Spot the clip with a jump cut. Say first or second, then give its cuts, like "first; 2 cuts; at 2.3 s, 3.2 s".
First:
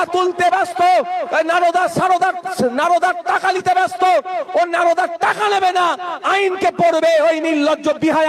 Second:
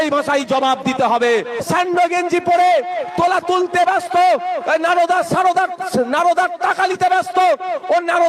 second; 1 cut; at 1.6 s